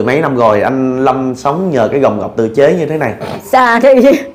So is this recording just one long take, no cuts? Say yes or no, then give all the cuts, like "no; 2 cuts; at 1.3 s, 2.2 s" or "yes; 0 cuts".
no; 1 cut; at 3.4 s